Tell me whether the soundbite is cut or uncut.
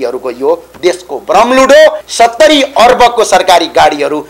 cut